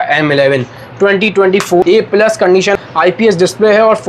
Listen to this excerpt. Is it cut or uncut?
cut